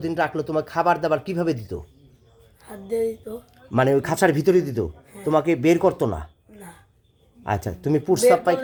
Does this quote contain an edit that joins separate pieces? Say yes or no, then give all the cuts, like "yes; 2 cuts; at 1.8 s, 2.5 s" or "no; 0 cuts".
no; 0 cuts